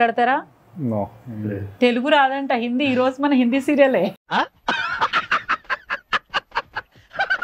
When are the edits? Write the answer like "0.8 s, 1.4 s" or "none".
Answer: none